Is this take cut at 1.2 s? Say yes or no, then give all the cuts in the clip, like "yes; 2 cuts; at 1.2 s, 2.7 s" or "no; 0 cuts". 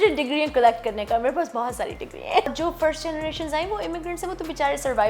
no; 1 cut; at 2.5 s